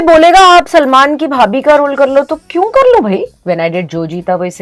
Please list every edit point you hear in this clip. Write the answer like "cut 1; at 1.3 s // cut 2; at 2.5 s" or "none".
cut 1; at 3.4 s